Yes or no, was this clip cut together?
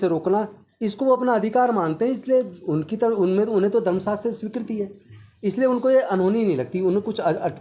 no